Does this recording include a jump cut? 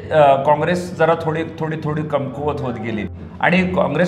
yes; 1 cut; at 3.1 s

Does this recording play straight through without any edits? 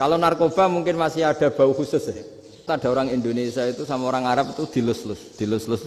no; 1 cut; at 2.7 s

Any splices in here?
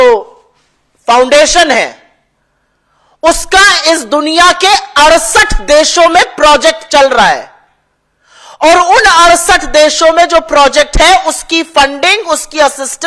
no; 0 cuts

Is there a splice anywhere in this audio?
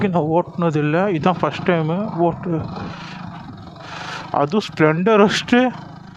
no; 0 cuts

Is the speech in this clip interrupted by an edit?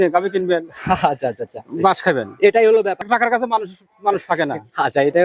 no; 0 cuts

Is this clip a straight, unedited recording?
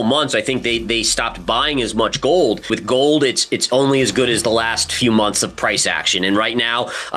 no; 1 cut; at 2.7 s

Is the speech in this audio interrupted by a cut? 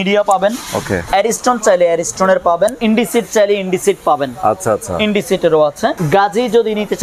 yes; 3 cuts; at 1.0 s, 2.8 s, 6.0 s

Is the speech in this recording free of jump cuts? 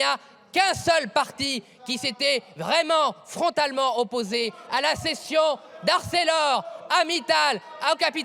yes; 0 cuts

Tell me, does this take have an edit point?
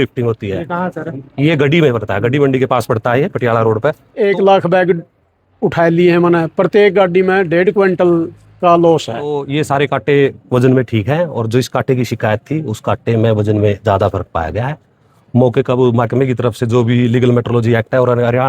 yes; 2 cuts; at 4.1 s, 9.4 s

